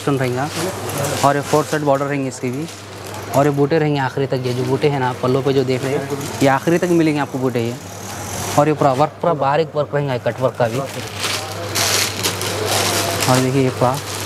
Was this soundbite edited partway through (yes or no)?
no